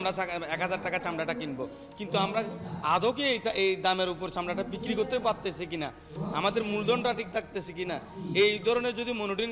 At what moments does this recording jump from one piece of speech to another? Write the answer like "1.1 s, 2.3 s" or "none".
none